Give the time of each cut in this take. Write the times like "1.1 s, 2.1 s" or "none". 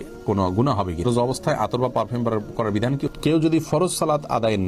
1.0 s, 3.1 s